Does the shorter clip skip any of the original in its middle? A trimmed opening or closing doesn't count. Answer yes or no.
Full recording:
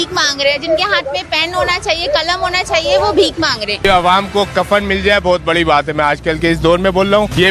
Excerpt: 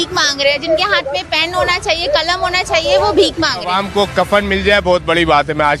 yes